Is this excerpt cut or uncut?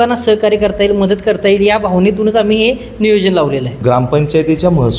cut